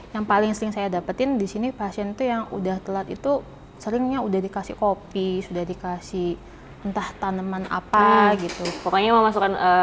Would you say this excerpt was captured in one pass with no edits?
yes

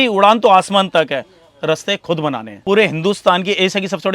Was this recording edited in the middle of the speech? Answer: yes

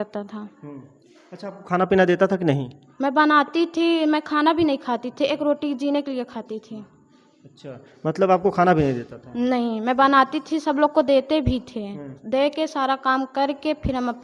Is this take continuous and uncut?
yes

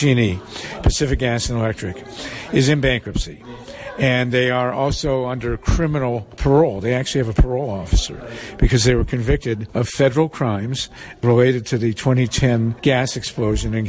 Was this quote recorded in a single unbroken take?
no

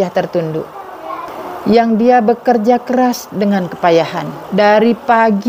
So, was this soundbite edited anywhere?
yes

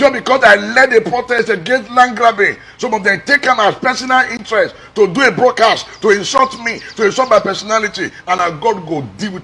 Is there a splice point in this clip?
no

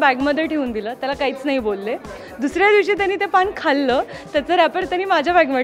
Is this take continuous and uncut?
yes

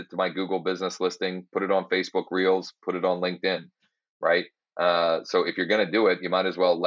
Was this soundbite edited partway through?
no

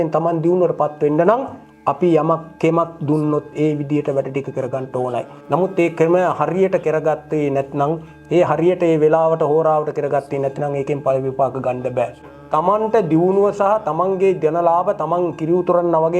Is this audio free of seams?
no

